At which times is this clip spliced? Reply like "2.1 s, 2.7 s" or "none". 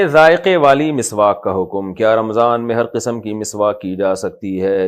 none